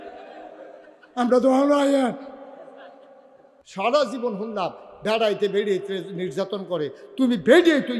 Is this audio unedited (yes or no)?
no